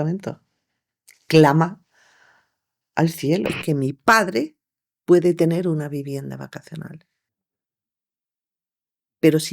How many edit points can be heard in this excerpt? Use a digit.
1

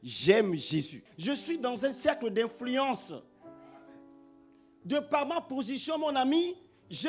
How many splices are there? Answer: 1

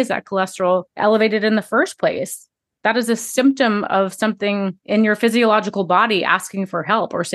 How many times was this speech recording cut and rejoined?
2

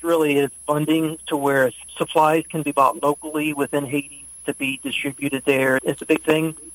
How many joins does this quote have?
1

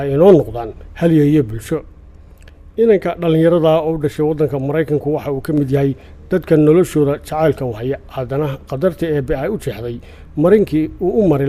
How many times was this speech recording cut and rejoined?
1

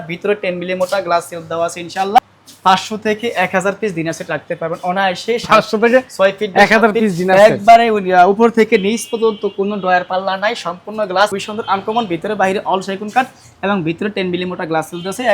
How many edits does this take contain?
2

